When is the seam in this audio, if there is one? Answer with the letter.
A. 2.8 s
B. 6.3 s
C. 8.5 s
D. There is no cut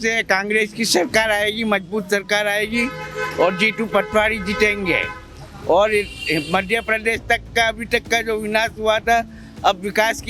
D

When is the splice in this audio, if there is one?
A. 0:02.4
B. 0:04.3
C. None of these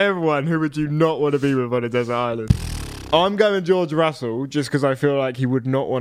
A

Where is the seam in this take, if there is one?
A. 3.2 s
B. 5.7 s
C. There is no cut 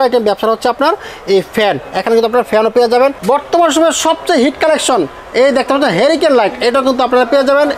A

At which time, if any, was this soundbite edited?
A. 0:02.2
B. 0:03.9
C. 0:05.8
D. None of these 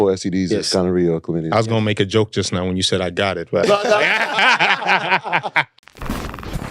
C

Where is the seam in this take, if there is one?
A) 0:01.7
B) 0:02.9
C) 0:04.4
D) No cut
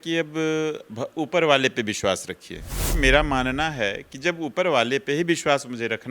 B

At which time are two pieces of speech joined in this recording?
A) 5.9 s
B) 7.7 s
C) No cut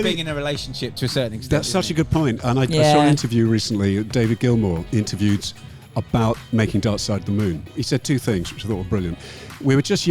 B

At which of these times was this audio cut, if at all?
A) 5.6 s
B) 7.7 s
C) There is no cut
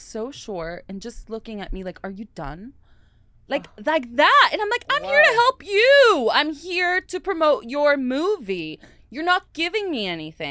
C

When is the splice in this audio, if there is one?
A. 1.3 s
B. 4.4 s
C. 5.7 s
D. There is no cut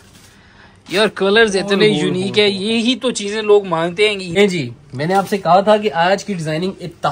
B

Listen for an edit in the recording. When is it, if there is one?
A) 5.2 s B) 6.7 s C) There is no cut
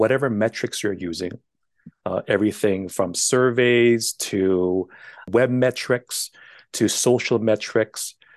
A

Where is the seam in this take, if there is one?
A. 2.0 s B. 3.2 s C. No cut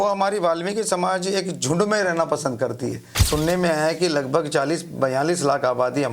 B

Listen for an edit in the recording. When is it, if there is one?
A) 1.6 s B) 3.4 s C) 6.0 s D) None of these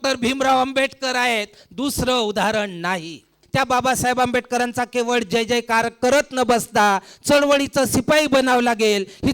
B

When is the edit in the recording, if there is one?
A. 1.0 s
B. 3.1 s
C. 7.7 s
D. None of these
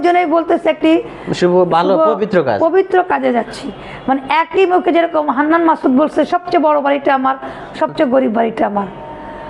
D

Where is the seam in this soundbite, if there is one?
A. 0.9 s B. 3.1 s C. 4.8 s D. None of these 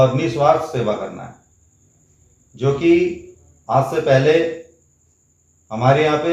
D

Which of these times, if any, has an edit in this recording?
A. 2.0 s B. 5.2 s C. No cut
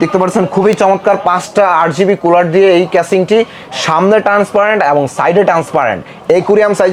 C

